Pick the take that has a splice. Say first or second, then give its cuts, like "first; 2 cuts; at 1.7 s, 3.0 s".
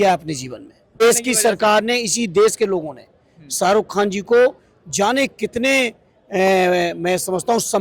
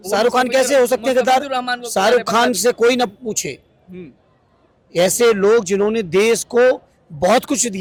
first; 1 cut; at 1.0 s